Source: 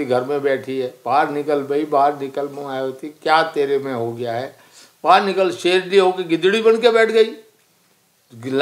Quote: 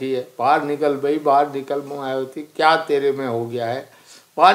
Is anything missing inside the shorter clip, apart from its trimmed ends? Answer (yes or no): no